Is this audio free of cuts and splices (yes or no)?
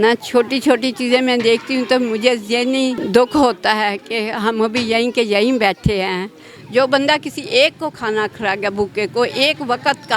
no